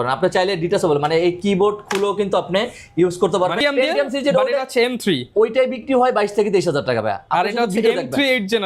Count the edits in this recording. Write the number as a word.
one